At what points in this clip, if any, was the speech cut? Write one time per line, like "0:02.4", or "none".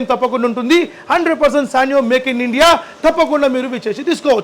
none